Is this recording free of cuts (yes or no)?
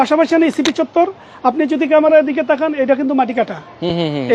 yes